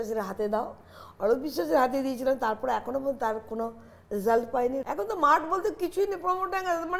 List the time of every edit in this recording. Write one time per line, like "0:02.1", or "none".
0:04.8